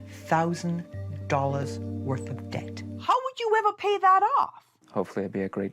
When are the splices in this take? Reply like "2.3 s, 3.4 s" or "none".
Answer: 2.9 s